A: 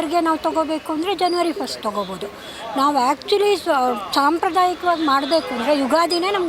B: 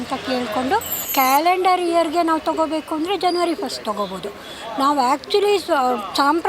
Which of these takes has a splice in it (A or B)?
B